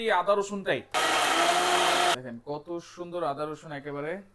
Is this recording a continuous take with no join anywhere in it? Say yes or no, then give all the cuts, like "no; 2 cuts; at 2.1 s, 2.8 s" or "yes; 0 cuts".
no; 2 cuts; at 0.9 s, 2.2 s